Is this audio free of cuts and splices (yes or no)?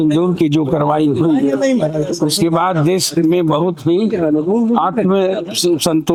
yes